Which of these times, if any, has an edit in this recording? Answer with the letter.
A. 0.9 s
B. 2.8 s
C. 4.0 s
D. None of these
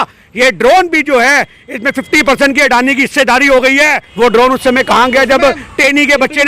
C